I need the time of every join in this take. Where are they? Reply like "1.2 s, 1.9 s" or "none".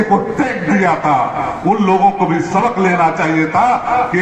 none